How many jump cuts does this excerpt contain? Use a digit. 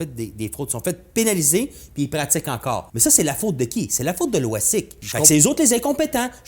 2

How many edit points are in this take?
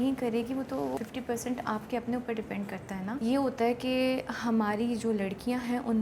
2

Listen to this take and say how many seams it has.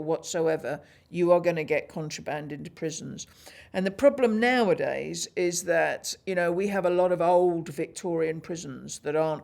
0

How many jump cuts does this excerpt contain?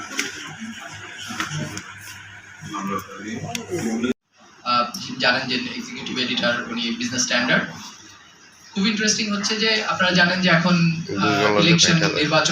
1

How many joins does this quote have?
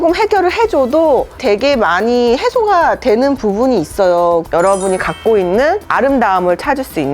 1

